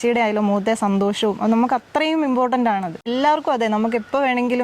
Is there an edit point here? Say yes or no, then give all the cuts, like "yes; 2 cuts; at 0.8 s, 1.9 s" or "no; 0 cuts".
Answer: yes; 1 cut; at 3.0 s